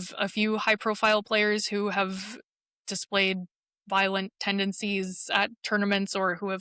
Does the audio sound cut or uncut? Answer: uncut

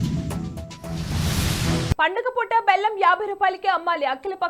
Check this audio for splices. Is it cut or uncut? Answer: cut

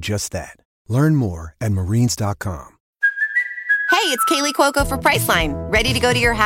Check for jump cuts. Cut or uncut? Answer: cut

